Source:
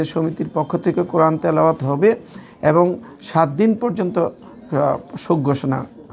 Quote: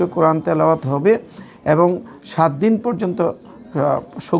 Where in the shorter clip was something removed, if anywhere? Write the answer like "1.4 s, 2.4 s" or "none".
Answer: none